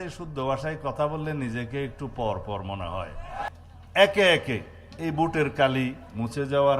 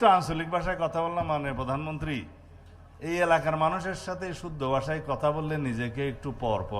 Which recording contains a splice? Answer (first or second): first